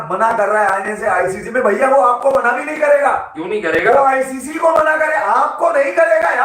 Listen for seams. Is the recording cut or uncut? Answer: uncut